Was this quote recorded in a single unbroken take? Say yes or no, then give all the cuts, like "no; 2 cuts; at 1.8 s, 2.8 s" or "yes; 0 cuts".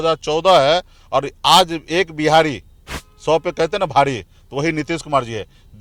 yes; 0 cuts